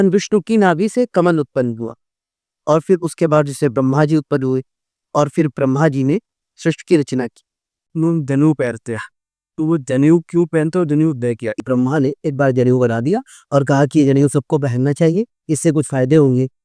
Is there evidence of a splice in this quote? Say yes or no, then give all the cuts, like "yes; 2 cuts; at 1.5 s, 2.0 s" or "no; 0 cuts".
yes; 2 cuts; at 7.9 s, 11.6 s